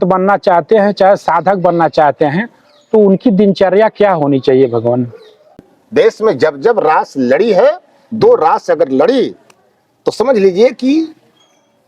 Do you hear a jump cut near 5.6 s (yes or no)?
yes